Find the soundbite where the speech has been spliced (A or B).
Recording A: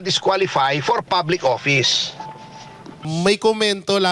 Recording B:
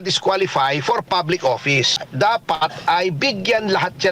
B